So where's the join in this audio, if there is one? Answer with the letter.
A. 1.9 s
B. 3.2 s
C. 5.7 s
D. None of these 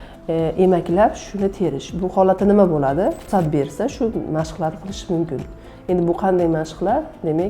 B